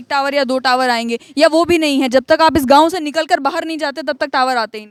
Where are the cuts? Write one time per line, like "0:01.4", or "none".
none